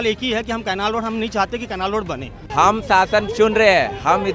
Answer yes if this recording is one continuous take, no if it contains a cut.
no